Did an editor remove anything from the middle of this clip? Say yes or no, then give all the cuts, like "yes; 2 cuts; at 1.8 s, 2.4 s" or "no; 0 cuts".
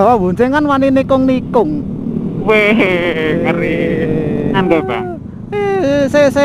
yes; 1 cut; at 4.6 s